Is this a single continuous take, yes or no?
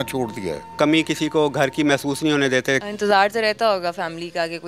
no